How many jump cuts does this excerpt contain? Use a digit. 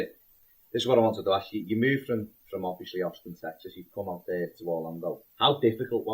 1